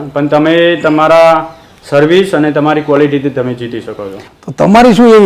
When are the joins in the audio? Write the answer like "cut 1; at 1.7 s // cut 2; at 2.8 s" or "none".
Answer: none